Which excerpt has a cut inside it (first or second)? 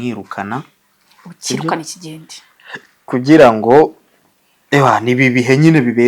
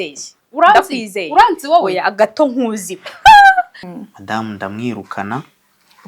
second